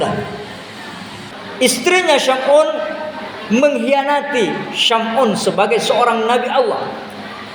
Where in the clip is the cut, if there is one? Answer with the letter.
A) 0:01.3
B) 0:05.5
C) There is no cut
A